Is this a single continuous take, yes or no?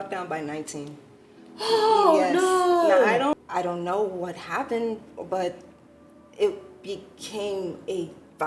no